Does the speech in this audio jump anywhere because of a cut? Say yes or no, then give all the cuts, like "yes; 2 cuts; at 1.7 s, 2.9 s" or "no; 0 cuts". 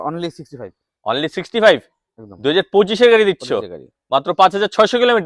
no; 0 cuts